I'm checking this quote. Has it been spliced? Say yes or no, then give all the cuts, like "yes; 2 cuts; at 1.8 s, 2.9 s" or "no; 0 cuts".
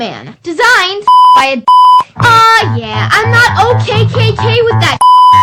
no; 0 cuts